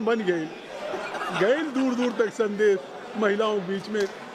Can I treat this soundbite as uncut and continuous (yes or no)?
yes